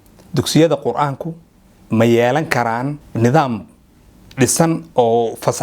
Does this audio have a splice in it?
yes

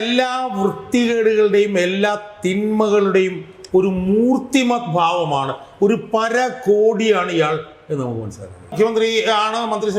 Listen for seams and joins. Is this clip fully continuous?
no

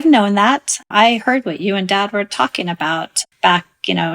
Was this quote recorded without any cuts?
no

